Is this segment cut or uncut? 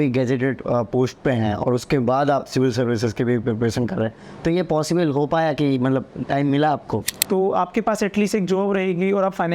cut